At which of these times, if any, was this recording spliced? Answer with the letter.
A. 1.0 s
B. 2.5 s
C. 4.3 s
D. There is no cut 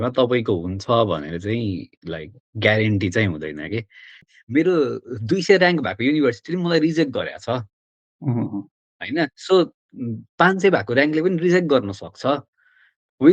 C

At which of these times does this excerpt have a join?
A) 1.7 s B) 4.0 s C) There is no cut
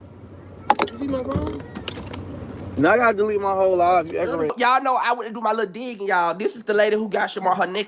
B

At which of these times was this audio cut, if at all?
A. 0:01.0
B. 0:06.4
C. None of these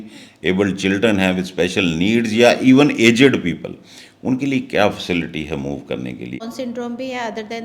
B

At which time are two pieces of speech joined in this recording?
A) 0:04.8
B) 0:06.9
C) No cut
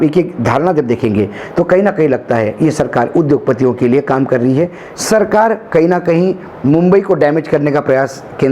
A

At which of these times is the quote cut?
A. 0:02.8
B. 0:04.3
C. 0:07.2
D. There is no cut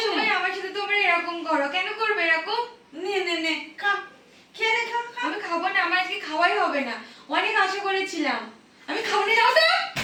D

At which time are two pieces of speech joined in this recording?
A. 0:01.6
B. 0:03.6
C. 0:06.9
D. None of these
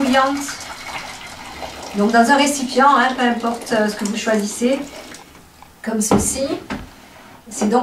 D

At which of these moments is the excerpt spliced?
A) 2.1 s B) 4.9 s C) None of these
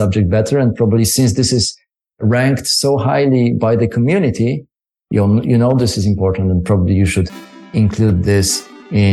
C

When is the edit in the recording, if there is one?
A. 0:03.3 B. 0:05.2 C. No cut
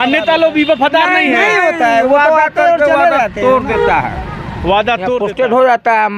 B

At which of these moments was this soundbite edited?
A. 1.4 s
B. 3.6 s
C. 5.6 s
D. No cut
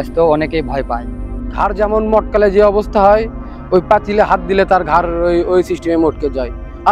A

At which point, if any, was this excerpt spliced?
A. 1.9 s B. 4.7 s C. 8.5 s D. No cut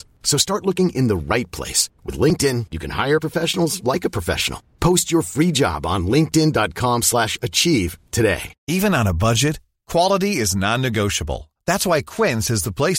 C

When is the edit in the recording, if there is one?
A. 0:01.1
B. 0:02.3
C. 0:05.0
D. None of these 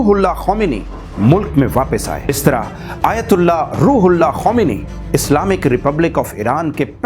B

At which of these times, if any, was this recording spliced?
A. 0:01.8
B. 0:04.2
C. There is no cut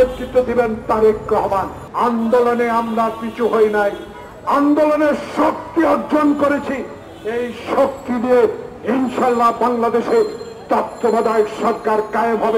A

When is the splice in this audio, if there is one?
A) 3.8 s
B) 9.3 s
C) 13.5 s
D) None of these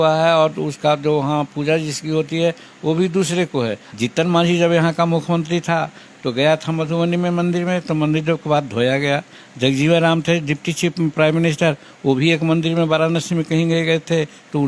A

